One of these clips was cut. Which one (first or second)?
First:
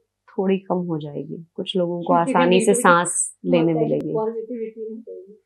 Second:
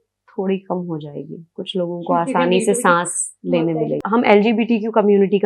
second